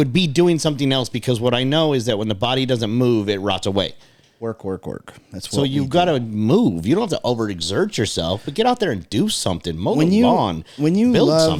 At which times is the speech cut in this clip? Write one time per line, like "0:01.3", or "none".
none